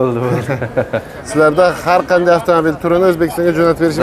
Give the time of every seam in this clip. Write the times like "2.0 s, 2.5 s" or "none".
1.2 s